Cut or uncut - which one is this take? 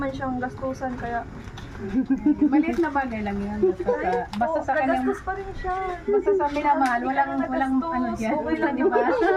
uncut